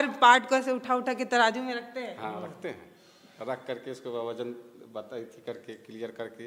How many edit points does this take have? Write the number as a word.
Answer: zero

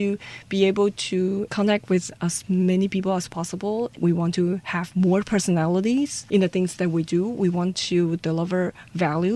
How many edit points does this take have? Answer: zero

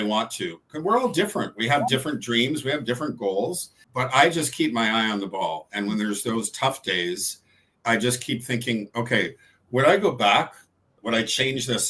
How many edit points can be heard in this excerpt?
two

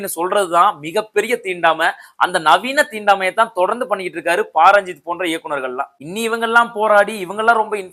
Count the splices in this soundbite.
zero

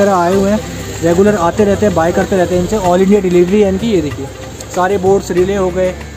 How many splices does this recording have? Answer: zero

